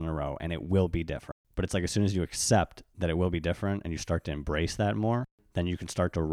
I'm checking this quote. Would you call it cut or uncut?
cut